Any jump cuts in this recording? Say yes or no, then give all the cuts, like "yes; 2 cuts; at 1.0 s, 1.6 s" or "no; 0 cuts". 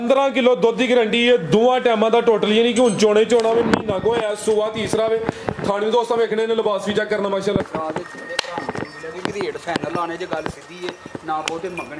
yes; 1 cut; at 7.6 s